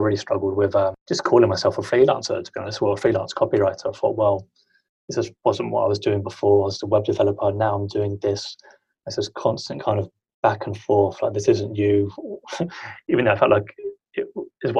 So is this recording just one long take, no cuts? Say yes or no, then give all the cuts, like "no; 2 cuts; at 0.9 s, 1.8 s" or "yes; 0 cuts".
no; 1 cut; at 1.0 s